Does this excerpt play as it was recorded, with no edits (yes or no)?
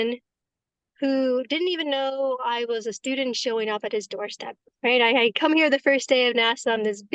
yes